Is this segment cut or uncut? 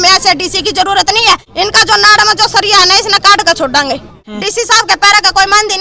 cut